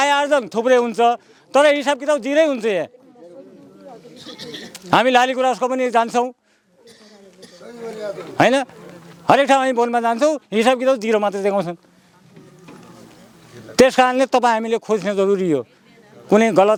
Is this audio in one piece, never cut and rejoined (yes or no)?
yes